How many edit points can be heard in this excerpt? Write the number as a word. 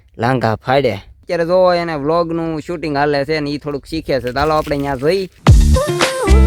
two